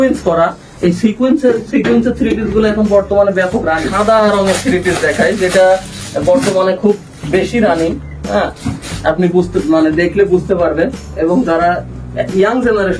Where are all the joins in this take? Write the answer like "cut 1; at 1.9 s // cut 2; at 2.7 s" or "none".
cut 1; at 3.9 s